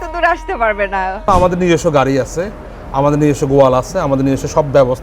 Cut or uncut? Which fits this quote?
cut